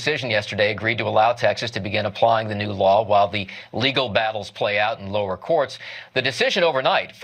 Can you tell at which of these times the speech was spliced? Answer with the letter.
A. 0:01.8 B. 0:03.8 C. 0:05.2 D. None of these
B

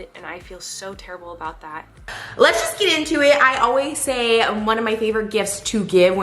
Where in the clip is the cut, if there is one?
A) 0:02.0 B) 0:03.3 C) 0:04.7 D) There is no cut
A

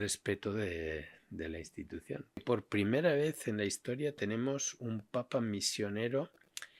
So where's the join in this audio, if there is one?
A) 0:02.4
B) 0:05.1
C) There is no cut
A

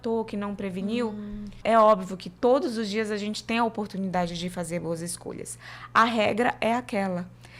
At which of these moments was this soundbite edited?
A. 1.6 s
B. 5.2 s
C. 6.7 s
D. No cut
A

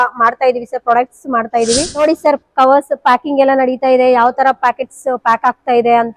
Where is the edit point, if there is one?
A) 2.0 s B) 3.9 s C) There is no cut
A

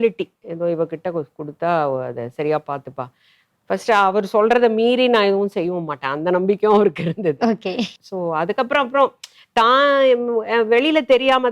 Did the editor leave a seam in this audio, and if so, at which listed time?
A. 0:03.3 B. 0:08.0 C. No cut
B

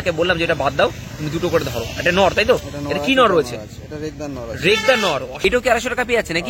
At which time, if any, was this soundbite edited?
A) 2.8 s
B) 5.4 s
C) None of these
B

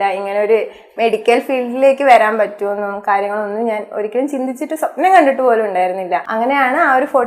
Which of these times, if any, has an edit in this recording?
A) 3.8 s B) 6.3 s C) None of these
B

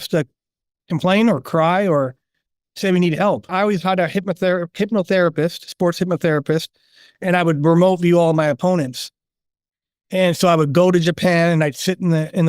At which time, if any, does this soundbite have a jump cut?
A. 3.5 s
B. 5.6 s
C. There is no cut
A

